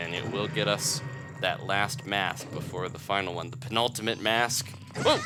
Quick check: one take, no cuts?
yes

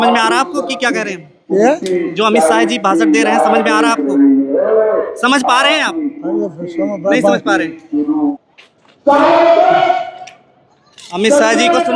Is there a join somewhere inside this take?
yes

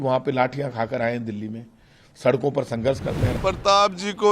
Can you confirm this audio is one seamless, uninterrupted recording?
no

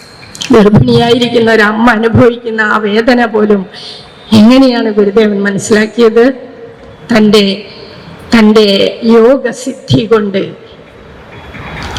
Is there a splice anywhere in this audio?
no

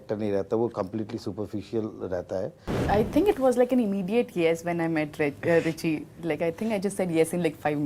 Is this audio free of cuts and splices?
no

